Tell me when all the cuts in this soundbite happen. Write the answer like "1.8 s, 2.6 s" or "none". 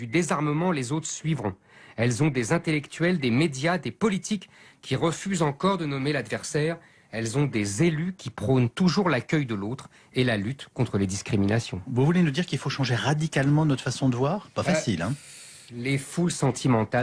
none